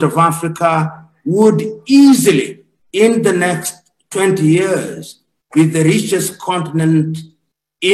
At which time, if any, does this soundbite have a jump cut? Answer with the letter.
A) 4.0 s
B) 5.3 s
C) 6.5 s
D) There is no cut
D